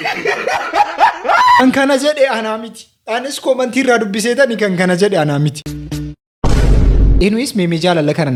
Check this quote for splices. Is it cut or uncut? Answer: uncut